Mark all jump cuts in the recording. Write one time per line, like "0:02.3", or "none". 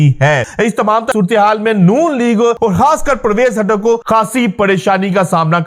0:01.0
0:02.6
0:04.0